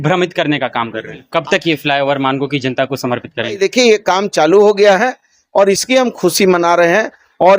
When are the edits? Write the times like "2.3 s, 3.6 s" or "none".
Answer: 1.2 s, 3.6 s